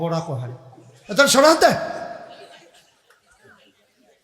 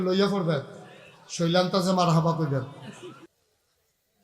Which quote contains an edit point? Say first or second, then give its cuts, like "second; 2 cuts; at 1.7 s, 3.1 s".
second; 1 cut; at 3.3 s